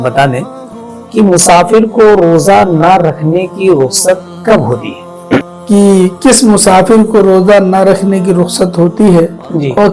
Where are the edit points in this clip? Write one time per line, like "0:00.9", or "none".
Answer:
0:05.4